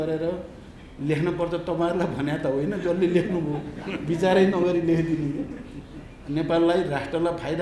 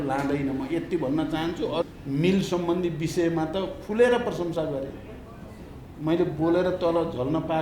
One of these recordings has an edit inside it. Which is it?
second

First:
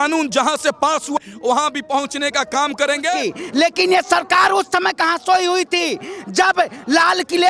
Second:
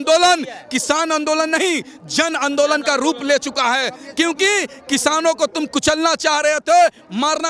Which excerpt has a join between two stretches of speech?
first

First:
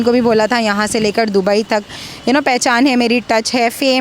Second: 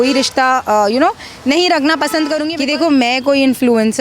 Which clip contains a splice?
second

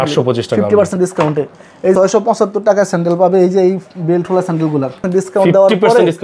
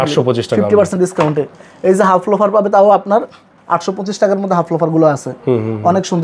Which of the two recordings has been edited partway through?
first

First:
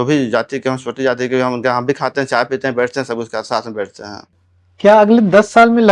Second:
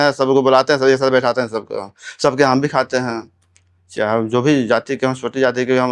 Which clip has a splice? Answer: first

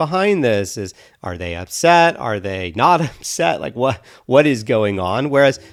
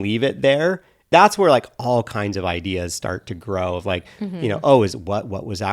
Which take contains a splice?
second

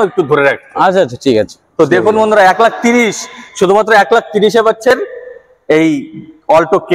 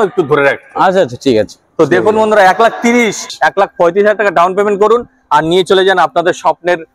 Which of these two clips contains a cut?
second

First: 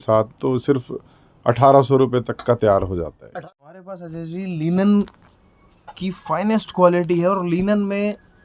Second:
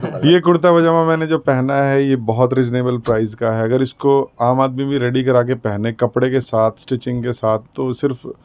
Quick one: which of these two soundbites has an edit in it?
first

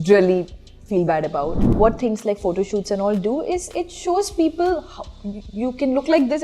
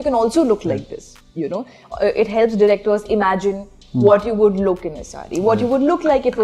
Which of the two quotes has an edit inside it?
first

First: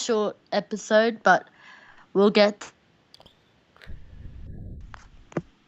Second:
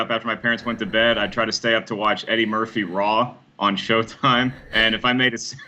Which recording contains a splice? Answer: first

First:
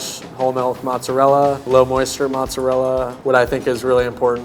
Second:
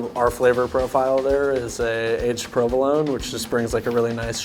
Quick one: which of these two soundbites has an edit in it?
first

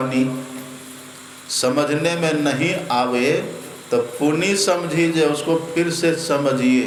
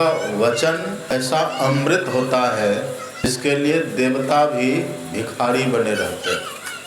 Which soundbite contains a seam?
second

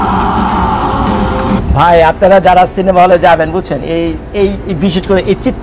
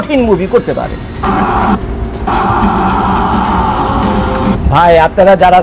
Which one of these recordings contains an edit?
second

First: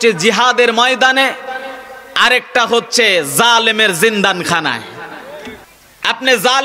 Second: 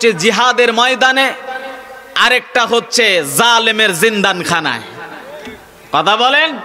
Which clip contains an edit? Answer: first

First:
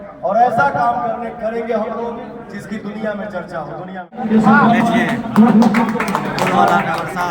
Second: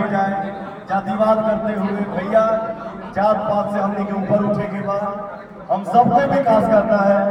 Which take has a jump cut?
first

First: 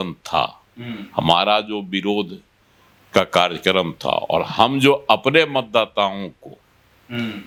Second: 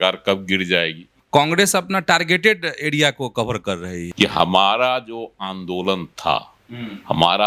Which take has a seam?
second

